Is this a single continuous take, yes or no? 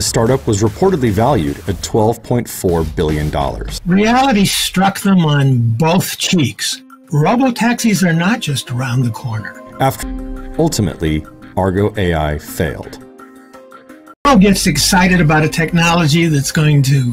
no